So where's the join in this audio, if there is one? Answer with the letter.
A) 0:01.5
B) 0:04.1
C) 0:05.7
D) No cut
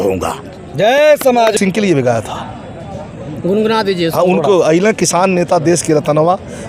A